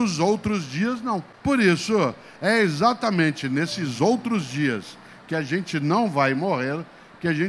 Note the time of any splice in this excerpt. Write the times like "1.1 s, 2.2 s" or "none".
1.3 s